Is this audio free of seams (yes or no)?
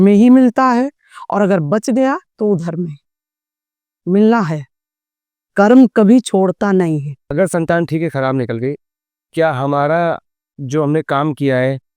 no